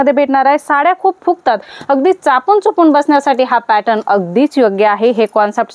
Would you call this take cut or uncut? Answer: uncut